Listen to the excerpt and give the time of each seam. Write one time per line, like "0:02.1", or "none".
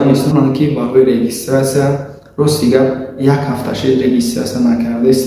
none

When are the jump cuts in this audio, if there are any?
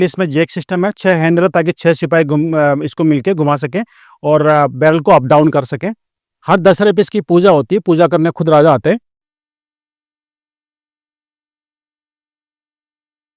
none

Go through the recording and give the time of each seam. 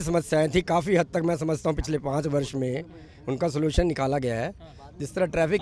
none

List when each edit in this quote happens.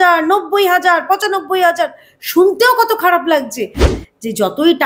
0:03.9

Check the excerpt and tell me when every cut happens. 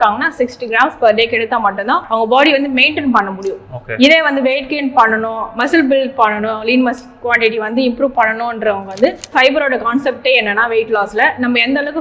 0:09.3

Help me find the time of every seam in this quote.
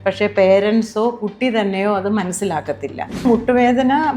0:03.2

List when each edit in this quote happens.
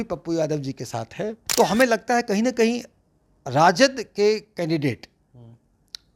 0:01.3

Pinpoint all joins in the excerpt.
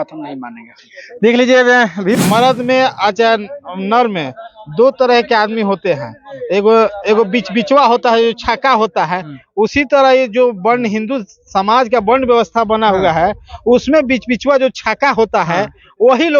0:02.2

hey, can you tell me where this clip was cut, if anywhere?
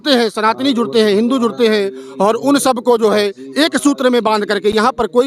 none

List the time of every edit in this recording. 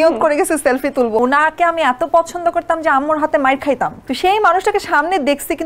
0:01.2
0:04.0

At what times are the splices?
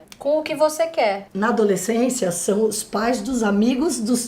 0:01.3

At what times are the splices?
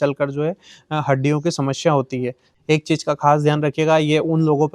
0:02.5

